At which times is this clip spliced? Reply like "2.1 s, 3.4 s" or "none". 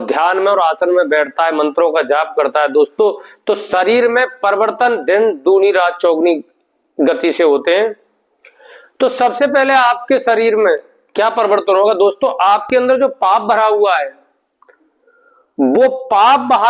none